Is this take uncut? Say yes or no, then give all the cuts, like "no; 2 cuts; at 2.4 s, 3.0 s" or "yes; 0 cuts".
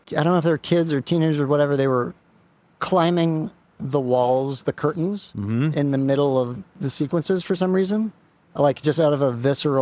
yes; 0 cuts